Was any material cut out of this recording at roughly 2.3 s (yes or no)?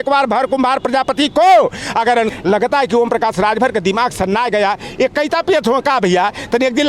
yes